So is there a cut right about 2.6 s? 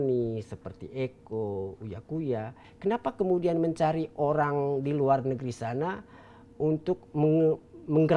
yes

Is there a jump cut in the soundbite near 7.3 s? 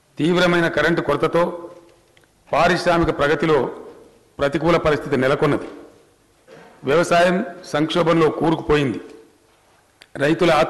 yes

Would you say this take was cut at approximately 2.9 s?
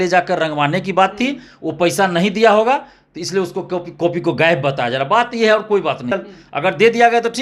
no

